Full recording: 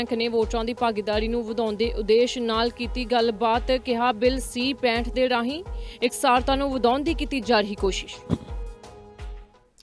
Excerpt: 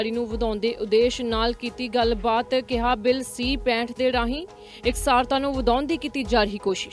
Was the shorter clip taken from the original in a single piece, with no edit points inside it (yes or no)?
yes